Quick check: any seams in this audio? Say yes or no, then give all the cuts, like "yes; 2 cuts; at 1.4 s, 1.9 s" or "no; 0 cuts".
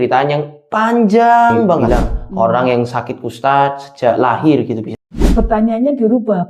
yes; 2 cuts; at 1.8 s, 5.2 s